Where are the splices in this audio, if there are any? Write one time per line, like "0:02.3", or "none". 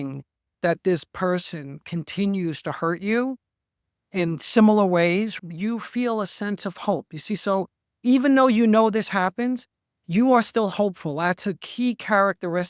none